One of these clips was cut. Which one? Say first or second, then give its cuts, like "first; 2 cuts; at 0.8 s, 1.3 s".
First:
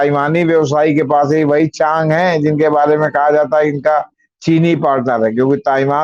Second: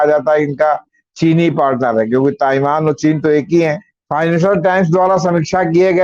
second; 1 cut; at 3.9 s